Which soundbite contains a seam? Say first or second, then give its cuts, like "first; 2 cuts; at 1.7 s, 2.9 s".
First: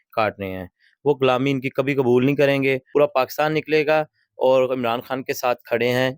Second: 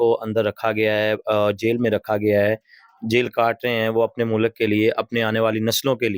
first; 1 cut; at 2.8 s